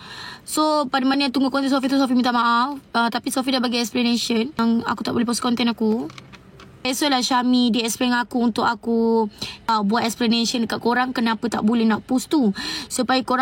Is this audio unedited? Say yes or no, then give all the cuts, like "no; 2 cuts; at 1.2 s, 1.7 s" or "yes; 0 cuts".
no; 3 cuts; at 4.6 s, 6.9 s, 9.7 s